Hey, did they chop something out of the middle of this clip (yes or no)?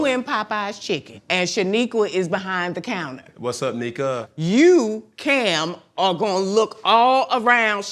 yes